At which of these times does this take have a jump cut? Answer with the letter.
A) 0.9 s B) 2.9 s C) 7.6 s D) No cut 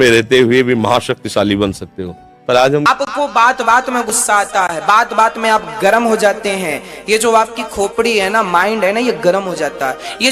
B